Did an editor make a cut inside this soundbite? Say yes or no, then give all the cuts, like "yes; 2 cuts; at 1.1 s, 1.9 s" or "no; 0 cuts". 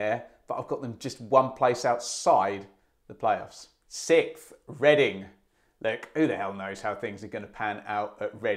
no; 0 cuts